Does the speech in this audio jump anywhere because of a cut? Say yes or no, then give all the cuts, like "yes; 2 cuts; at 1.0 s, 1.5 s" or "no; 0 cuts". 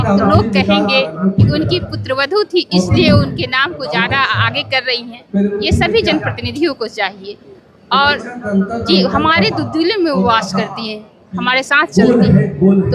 no; 0 cuts